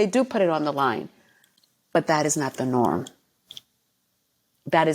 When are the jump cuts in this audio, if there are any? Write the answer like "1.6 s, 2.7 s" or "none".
none